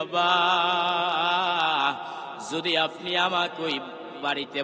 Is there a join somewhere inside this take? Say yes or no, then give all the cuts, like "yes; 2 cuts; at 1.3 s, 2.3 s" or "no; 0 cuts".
no; 0 cuts